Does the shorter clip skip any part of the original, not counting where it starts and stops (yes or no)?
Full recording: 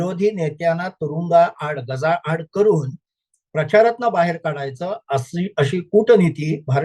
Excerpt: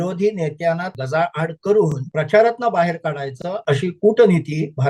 yes